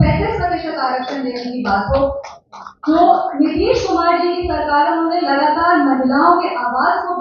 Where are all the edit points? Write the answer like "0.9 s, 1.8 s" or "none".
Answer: none